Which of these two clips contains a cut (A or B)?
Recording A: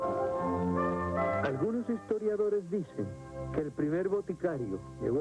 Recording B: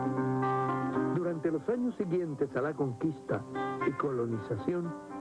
A